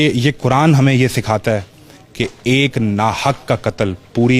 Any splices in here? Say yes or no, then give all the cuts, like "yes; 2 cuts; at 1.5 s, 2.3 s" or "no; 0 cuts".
no; 0 cuts